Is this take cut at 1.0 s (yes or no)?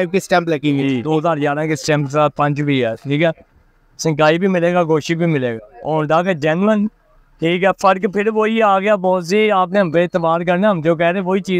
yes